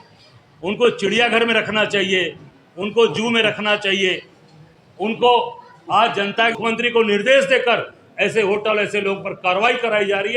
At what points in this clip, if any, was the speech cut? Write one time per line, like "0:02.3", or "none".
0:06.6